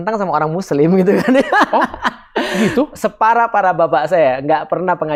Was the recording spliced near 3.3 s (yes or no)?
no